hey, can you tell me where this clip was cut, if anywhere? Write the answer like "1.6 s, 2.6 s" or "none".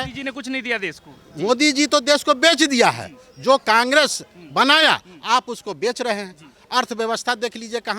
none